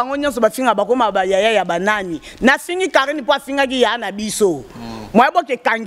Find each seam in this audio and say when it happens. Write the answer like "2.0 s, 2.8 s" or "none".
none